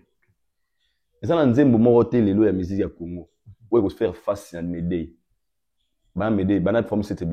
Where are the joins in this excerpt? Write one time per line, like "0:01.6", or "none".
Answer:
none

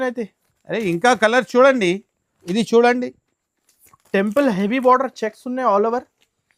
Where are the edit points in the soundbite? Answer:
none

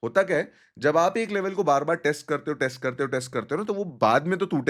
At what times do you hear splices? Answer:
none

